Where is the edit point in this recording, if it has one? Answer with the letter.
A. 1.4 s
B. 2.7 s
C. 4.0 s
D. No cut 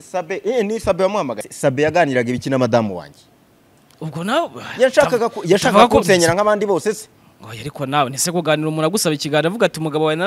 A